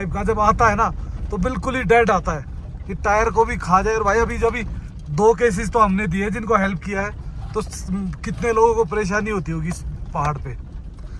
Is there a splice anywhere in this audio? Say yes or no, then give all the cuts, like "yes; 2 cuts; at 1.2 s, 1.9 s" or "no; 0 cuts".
no; 0 cuts